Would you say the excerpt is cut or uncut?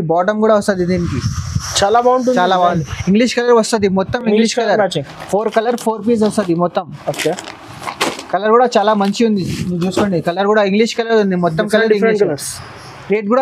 uncut